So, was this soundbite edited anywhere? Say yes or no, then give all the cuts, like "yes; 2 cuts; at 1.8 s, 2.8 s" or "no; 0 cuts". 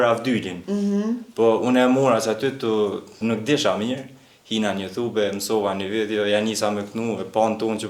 yes; 1 cut; at 3.2 s